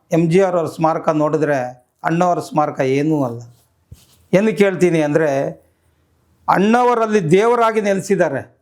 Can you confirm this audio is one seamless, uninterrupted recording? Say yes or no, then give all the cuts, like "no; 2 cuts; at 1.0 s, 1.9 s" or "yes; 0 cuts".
yes; 0 cuts